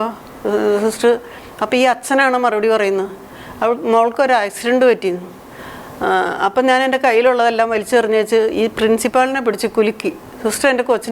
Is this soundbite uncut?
yes; 0 cuts

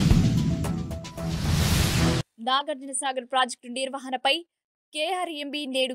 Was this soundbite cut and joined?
no; 0 cuts

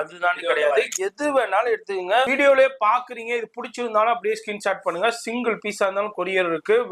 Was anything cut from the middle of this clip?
yes; 1 cut; at 2.3 s

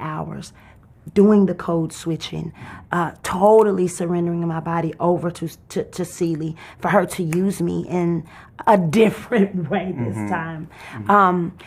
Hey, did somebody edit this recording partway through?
no; 0 cuts

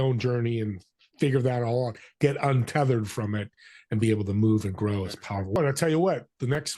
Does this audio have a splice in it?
yes; 1 cut; at 5.6 s

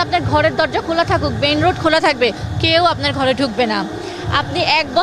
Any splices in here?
no; 0 cuts

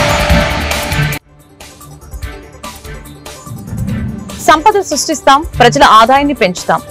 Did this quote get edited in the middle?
no; 0 cuts

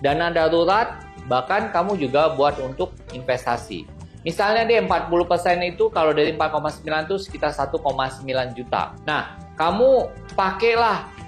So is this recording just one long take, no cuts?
yes; 0 cuts

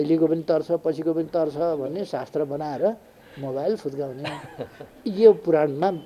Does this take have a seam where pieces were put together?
no; 0 cuts

